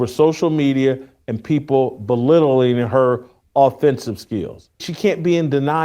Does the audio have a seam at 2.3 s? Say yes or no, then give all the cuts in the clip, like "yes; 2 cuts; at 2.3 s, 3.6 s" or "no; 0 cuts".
no; 1 cut; at 4.9 s